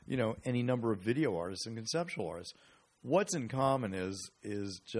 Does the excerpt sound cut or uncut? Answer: uncut